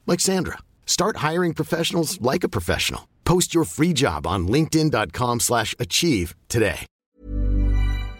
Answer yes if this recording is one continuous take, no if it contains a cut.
no